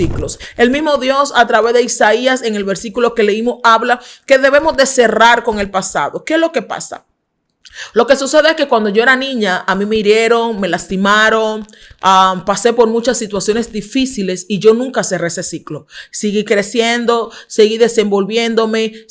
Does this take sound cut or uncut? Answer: uncut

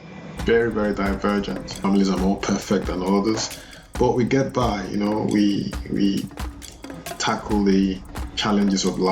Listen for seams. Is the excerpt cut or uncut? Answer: cut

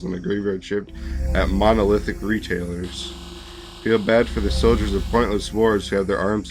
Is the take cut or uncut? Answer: uncut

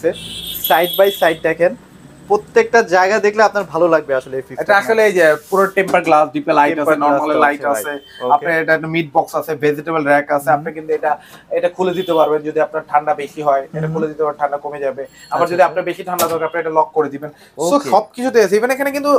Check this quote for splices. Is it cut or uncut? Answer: uncut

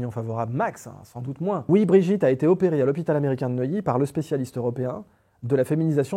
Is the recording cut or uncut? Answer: cut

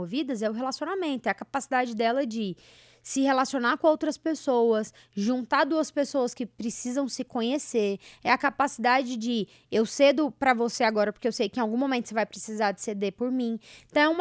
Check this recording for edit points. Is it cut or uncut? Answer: uncut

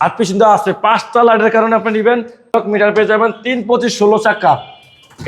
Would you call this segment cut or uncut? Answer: cut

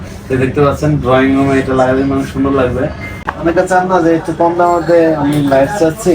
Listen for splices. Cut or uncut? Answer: cut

